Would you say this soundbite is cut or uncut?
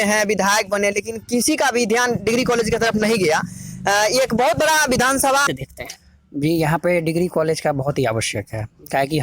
cut